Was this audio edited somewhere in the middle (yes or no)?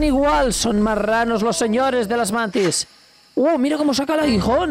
no